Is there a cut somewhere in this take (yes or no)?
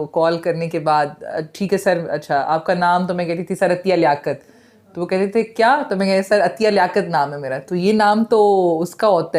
no